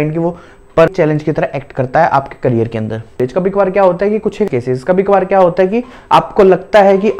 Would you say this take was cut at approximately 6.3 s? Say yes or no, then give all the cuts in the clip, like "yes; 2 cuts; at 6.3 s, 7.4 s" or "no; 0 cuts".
no; 3 cuts; at 0.9 s, 3.2 s, 4.4 s